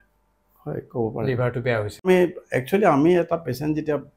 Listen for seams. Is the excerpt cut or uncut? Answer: cut